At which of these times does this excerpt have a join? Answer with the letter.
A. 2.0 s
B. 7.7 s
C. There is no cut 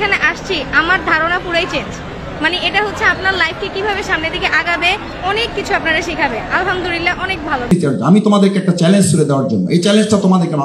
B